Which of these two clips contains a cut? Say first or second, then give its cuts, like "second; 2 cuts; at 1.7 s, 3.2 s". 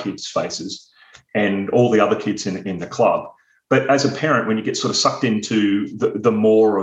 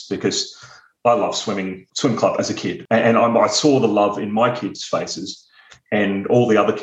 second; 3 cuts; at 0.9 s, 1.8 s, 2.8 s